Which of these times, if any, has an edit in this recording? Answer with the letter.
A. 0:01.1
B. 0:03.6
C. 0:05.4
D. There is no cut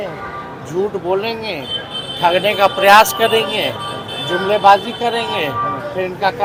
D